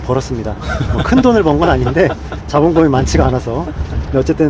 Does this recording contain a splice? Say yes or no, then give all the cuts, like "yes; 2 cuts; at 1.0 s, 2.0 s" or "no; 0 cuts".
no; 0 cuts